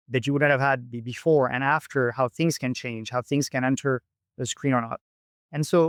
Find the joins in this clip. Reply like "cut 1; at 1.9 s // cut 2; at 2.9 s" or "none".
none